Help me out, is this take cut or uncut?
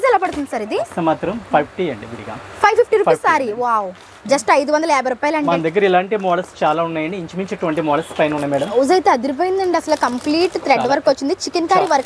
cut